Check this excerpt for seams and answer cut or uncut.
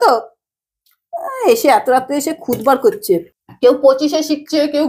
cut